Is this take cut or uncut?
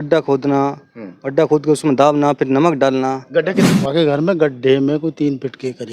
cut